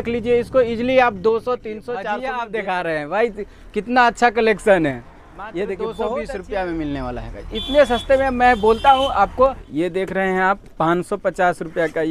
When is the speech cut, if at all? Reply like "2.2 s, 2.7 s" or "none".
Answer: 2.0 s, 6.3 s, 9.7 s